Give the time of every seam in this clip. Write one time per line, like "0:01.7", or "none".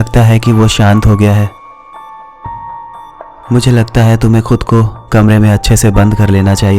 0:01.7
0:03.5